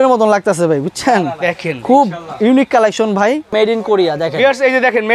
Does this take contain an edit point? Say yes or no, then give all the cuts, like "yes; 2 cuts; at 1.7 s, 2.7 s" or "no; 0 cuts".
yes; 1 cut; at 3.5 s